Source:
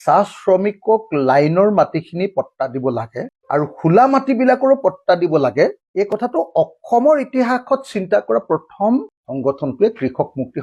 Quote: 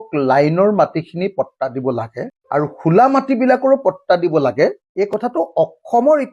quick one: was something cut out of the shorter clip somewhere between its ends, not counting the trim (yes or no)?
no